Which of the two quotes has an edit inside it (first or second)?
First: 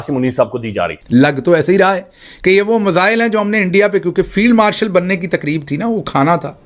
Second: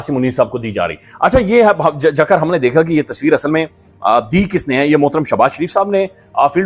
first